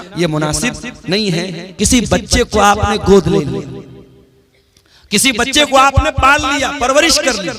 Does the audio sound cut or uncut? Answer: cut